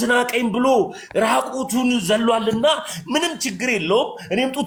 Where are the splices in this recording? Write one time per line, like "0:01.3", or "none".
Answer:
none